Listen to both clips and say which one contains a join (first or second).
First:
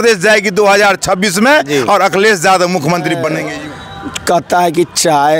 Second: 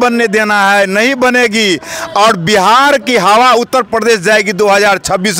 first